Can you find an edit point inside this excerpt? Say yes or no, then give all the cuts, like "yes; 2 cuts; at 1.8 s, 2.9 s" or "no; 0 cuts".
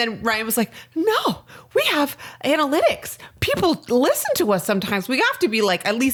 no; 0 cuts